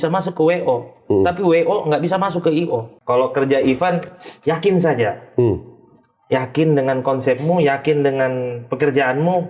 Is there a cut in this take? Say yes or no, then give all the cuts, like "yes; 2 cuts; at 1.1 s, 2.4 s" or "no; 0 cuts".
yes; 1 cut; at 2.9 s